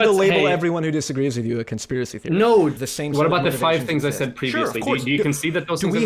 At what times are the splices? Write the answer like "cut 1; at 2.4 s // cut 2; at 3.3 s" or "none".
cut 1; at 2.8 s